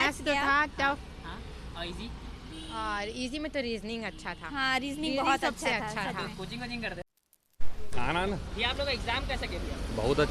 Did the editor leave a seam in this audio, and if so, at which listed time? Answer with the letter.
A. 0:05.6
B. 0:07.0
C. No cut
B